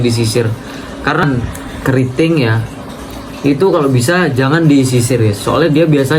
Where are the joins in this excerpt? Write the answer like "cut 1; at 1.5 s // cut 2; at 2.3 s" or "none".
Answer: cut 1; at 1.2 s